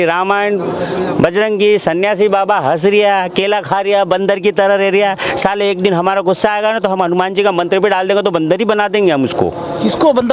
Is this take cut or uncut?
uncut